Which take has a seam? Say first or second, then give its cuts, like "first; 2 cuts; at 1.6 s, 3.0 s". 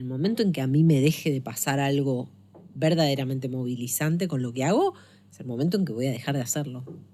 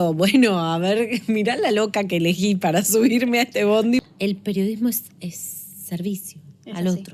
second; 1 cut; at 4.0 s